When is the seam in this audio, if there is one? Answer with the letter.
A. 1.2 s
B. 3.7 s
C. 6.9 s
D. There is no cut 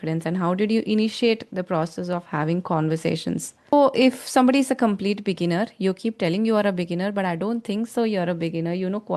B